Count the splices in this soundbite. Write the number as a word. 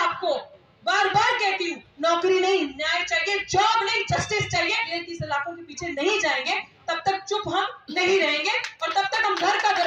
one